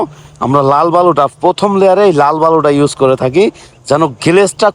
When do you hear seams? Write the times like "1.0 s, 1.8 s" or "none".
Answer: none